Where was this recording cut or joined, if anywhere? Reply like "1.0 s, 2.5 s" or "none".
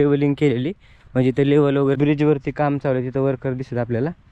2.0 s